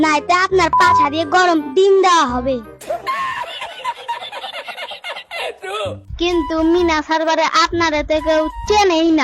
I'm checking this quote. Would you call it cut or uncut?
cut